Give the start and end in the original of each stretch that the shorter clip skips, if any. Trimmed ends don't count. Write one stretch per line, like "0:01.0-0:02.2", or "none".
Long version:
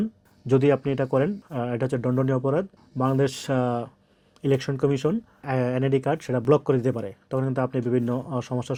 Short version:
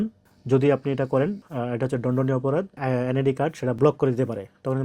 0:02.7-0:05.4